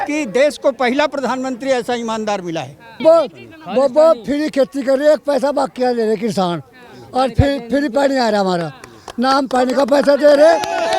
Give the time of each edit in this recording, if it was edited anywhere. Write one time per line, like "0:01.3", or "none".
0:02.9